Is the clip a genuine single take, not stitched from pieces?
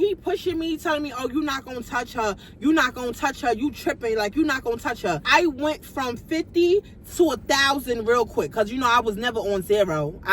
no; 1 cut; at 5.2 s

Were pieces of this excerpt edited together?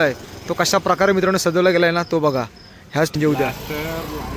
yes; 1 cut; at 3.1 s

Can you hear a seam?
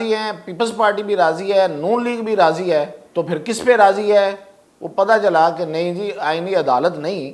yes; 1 cut; at 3.0 s

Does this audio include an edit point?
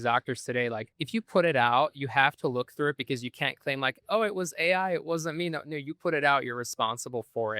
yes; 1 cut; at 0.9 s

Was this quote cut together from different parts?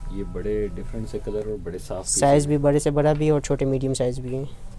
no; 0 cuts

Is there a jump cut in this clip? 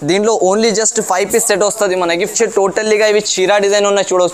yes; 1 cut; at 2.3 s

